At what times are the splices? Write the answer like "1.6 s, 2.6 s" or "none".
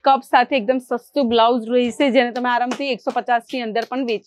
none